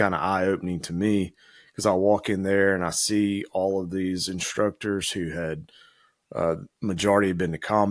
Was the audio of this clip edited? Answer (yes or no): no